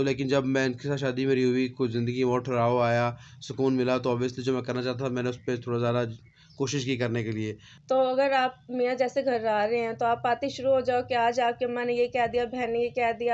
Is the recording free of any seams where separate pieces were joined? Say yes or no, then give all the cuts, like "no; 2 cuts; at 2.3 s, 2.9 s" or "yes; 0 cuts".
no; 1 cut; at 7.7 s